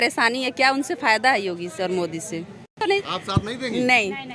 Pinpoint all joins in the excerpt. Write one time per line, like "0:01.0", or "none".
0:03.0